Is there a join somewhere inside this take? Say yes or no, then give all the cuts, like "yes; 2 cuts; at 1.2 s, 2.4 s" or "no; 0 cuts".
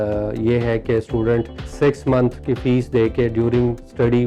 yes; 1 cut; at 1.6 s